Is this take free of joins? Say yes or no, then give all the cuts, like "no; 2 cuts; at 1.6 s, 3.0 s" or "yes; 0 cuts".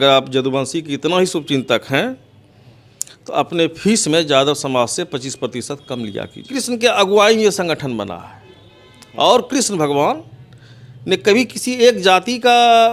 no; 1 cut; at 6.4 s